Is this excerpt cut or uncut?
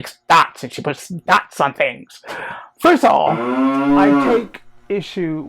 cut